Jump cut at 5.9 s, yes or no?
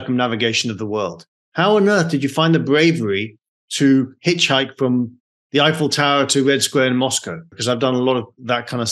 no